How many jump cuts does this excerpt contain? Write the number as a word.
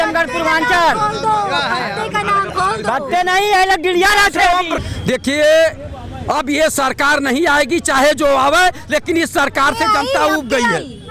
one